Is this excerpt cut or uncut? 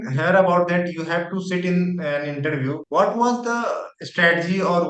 uncut